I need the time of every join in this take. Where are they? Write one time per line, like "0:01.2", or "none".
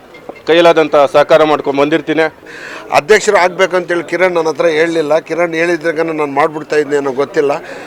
0:02.4